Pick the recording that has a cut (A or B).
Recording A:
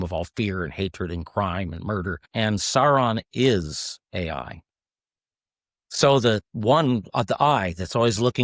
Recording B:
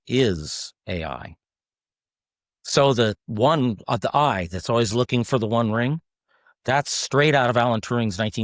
A